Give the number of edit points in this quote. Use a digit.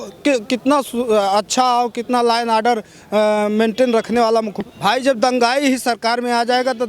1